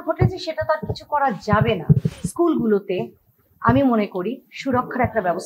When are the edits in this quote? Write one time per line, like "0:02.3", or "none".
0:02.2